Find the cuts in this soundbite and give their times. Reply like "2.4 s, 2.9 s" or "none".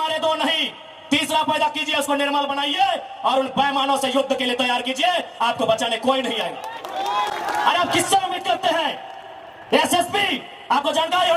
none